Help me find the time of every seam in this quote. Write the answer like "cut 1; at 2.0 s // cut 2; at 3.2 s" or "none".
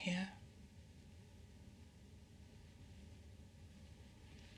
none